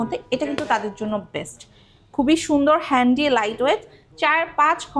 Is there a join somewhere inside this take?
no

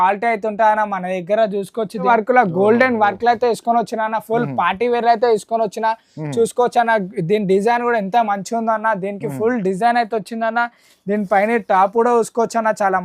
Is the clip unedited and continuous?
no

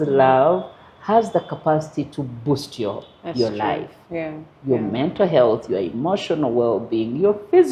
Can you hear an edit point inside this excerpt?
no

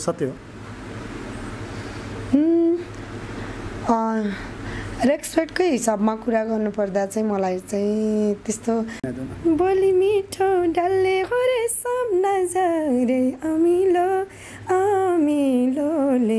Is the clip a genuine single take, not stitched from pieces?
no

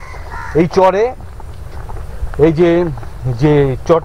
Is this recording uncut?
yes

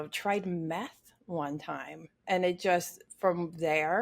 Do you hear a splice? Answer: yes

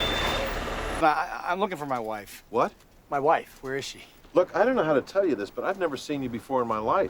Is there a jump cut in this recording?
yes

